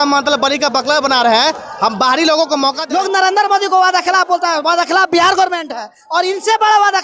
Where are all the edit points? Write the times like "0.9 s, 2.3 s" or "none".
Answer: 2.8 s